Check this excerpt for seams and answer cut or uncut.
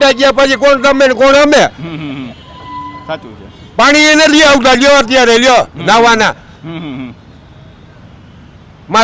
uncut